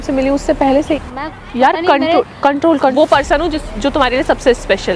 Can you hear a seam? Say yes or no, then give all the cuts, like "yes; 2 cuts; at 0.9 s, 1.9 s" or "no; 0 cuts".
yes; 2 cuts; at 1.0 s, 2.9 s